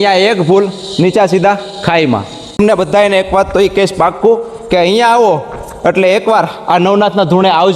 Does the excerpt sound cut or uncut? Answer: cut